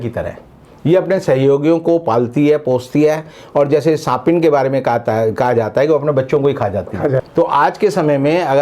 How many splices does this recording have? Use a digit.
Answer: 1